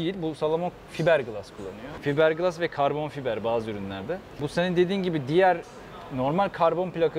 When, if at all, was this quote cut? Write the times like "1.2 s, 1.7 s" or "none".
1.9 s, 4.5 s